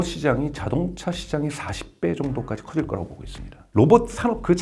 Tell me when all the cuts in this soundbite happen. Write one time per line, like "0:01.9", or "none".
0:03.7